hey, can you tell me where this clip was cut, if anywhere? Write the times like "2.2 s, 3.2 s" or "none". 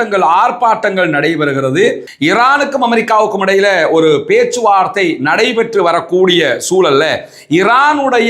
2.1 s

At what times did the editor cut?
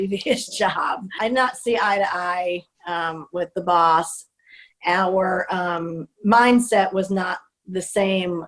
1.0 s

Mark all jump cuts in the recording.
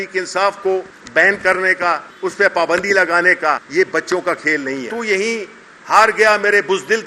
1.0 s, 2.1 s, 3.6 s, 4.9 s

